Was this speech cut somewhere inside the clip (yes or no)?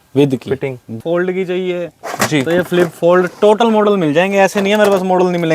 yes